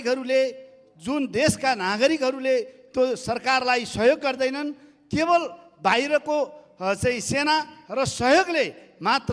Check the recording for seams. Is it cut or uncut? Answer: uncut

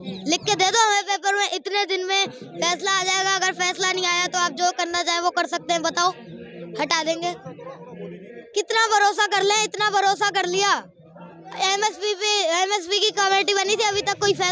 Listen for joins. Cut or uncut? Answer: uncut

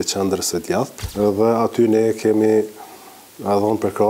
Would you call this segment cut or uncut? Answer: cut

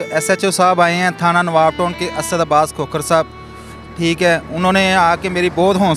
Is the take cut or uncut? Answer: uncut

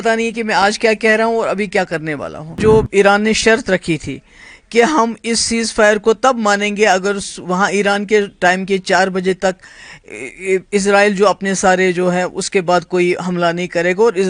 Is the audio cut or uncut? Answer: cut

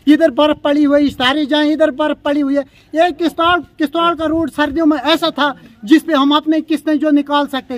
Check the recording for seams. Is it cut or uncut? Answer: uncut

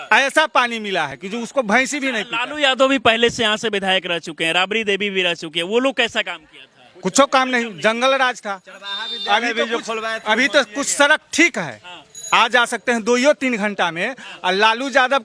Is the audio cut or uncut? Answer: uncut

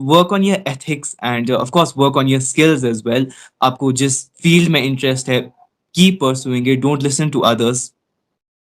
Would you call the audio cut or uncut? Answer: uncut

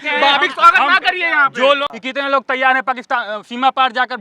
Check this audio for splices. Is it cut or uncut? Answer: cut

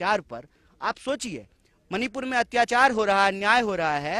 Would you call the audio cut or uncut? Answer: uncut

